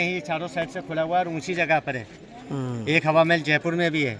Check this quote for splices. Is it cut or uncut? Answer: uncut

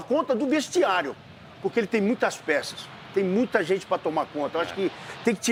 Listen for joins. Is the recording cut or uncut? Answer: uncut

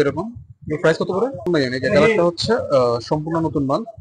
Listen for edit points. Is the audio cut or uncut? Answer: cut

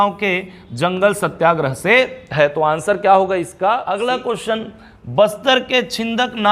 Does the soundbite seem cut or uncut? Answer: cut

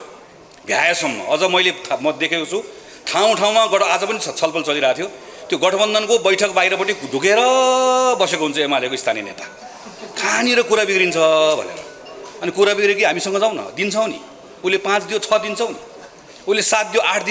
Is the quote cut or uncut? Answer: uncut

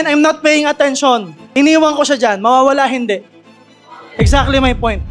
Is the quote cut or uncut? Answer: cut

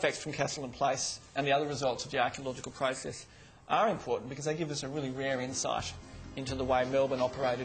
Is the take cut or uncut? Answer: uncut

